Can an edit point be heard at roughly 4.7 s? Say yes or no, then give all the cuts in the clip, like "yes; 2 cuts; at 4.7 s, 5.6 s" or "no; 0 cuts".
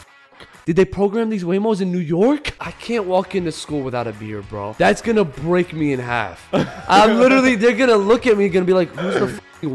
yes; 2 cuts; at 2.6 s, 4.7 s